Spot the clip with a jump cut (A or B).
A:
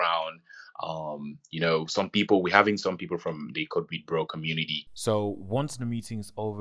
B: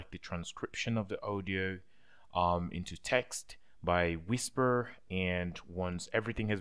A